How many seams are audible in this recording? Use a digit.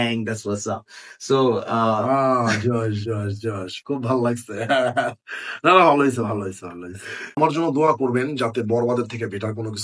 1